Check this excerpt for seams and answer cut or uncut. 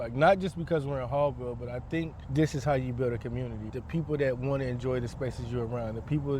cut